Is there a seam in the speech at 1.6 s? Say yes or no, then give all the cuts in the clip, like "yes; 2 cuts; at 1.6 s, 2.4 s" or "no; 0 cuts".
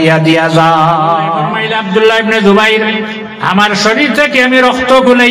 yes; 1 cut; at 1.6 s